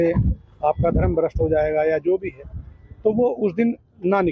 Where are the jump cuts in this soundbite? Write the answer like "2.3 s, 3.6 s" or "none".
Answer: 3.4 s